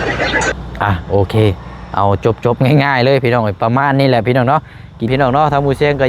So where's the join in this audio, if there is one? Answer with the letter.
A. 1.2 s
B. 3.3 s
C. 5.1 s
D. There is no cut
C